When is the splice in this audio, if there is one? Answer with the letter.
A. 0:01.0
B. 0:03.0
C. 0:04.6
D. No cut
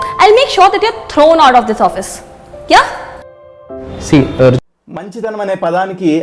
C